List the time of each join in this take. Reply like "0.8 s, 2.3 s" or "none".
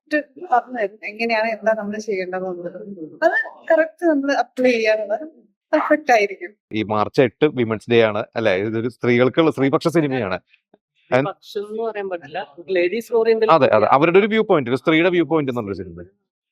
6.7 s